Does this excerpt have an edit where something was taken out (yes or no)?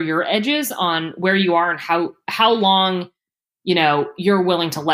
no